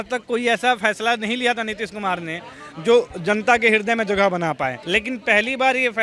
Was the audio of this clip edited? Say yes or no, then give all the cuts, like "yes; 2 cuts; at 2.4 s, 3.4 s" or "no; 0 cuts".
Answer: yes; 1 cut; at 4.8 s